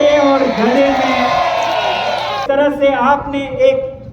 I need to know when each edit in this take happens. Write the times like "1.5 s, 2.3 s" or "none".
2.4 s